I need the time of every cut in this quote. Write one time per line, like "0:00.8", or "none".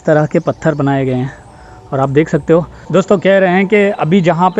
0:02.8